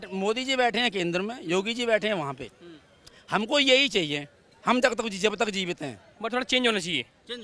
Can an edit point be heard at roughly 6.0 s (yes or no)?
yes